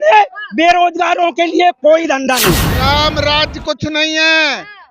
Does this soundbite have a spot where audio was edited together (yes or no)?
yes